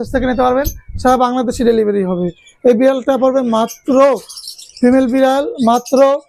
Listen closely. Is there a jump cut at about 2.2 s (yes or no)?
no